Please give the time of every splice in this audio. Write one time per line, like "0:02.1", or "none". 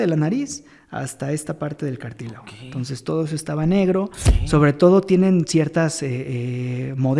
0:04.3